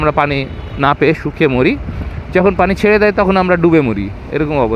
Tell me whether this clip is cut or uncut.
uncut